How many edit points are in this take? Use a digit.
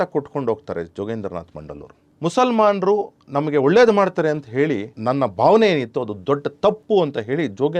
2